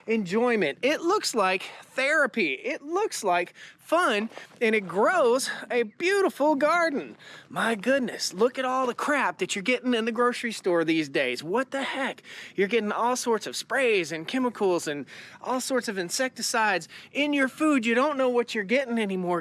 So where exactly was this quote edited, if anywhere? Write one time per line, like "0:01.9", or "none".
none